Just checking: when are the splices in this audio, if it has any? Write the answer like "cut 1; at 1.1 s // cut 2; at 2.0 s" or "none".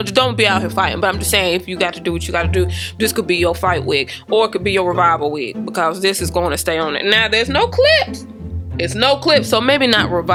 none